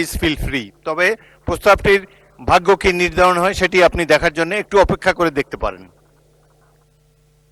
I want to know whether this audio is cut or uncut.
uncut